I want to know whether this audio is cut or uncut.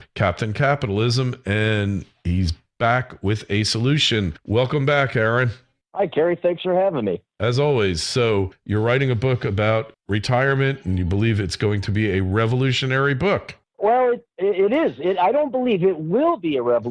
cut